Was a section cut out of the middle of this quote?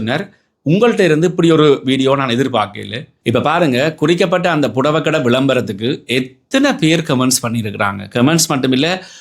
yes; 1 cut; at 3.1 s

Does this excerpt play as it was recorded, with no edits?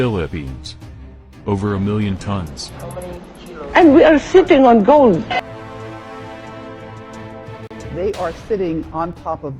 no; 1 cut; at 7.9 s

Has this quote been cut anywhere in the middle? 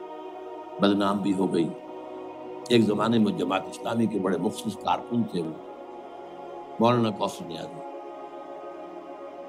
no; 0 cuts

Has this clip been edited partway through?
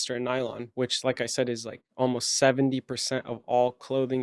no; 0 cuts

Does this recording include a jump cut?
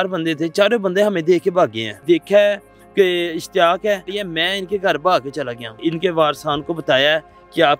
yes; 3 cuts; at 2.0 s, 4.2 s, 5.8 s

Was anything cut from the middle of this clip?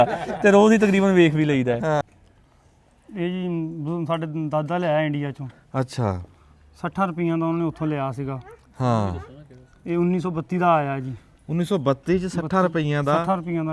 yes; 1 cut; at 2.0 s

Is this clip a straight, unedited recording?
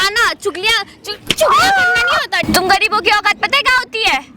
no; 1 cut; at 2.4 s

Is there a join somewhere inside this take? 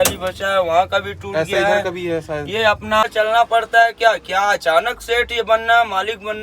yes; 1 cut; at 3.0 s

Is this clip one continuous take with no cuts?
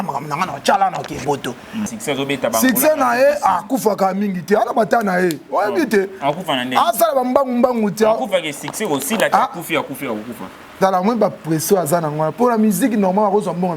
no; 1 cut; at 1.9 s

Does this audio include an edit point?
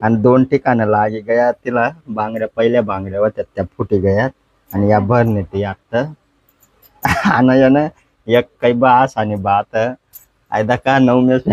no; 0 cuts

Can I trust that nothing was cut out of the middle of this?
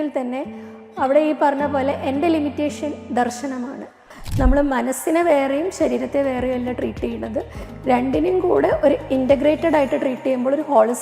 no; 1 cut; at 4.2 s

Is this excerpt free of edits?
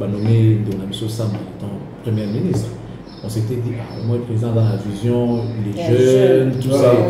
yes; 0 cuts

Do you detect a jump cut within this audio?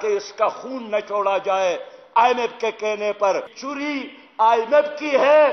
yes; 1 cut; at 3.6 s

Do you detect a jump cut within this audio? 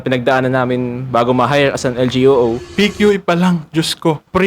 yes; 1 cut; at 2.7 s

